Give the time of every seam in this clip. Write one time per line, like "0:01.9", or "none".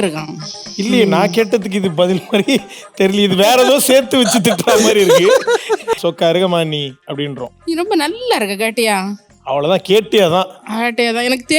0:06.0